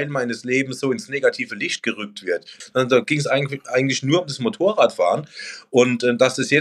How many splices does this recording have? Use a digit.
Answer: 1